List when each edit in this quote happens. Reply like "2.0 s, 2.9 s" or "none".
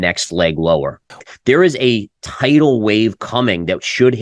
1.1 s